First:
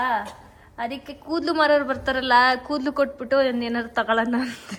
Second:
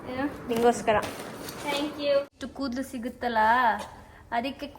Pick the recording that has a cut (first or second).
second